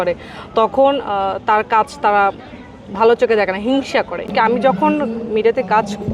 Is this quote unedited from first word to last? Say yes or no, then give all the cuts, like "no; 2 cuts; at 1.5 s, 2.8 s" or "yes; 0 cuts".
no; 1 cut; at 4.3 s